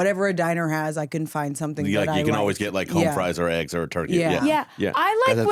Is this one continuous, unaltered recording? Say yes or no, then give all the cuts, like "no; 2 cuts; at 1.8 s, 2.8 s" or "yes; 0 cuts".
yes; 0 cuts